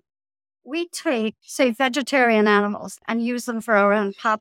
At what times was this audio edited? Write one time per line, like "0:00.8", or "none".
0:01.4
0:03.0